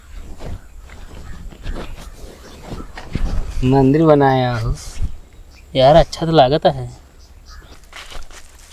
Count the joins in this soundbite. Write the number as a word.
one